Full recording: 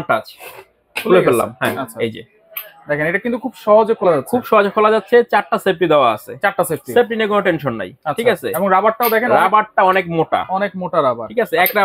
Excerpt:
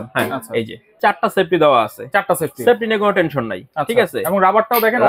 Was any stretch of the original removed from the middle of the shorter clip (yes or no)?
yes